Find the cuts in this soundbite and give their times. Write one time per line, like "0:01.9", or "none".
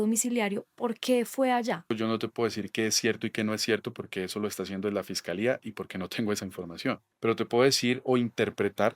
0:01.9
0:07.1

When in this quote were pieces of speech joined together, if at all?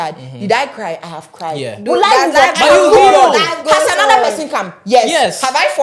none

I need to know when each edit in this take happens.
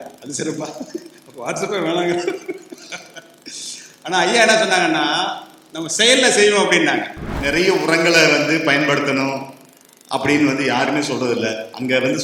0:07.3

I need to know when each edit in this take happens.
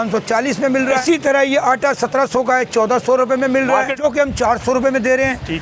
0:01.0
0:03.9

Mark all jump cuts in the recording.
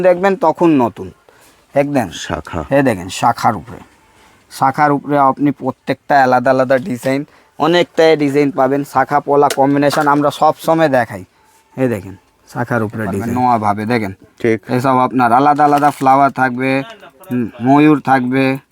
0:13.2

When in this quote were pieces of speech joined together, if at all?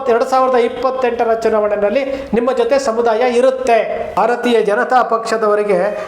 0:04.2

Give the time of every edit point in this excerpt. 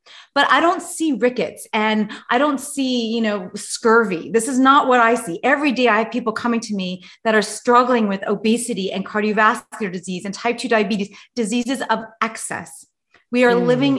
none

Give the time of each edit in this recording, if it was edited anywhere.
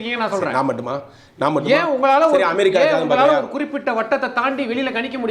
none

